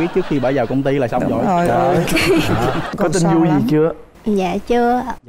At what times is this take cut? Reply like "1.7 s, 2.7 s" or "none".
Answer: 2.9 s

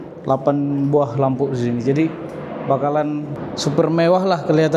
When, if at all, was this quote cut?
3.4 s

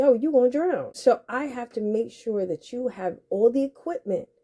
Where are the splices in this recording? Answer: 0.9 s

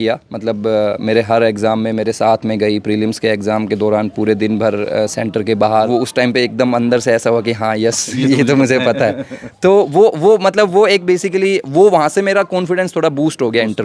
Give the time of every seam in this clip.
5.9 s

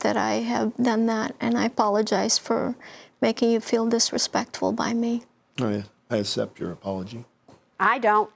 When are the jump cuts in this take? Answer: none

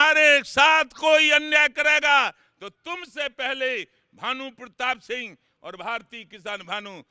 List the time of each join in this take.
none

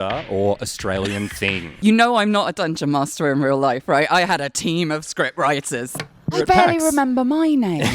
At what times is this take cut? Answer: 1.7 s, 6.1 s

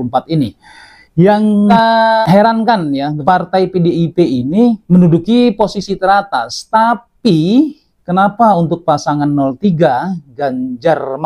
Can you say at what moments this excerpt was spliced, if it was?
none

